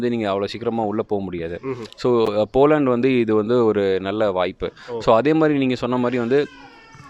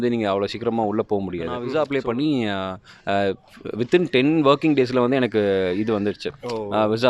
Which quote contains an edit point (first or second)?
second